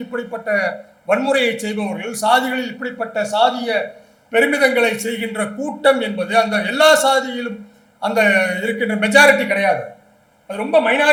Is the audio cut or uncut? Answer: uncut